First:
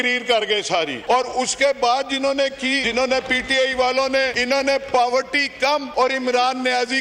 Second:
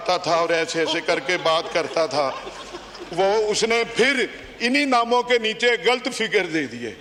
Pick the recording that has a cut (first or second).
first